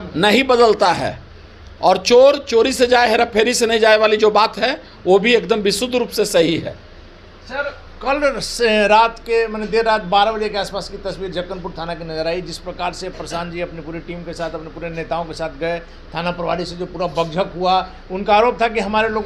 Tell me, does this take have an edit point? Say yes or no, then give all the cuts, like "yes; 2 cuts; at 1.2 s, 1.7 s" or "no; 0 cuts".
no; 0 cuts